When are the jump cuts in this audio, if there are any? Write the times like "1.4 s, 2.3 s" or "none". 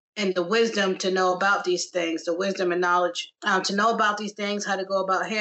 3.3 s